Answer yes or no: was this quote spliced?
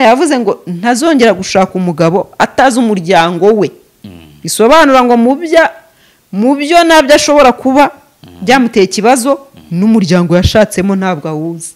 no